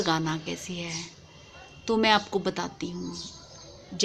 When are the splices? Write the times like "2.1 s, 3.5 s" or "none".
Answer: none

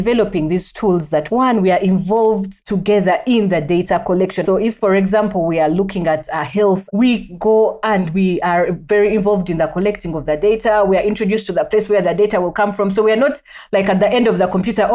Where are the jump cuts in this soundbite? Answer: 1.3 s, 4.6 s, 6.9 s

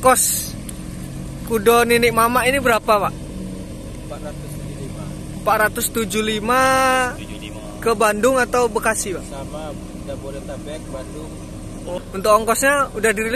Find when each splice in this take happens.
12.0 s

